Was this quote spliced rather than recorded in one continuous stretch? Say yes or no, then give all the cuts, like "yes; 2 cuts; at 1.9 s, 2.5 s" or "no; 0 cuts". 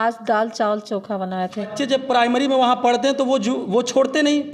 yes; 1 cut; at 1.7 s